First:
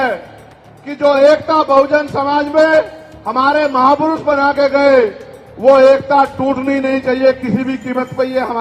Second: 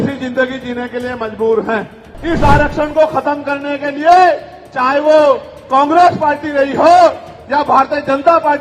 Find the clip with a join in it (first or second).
second